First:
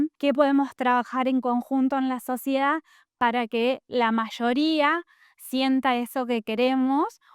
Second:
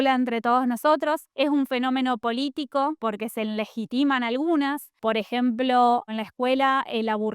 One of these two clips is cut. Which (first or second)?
second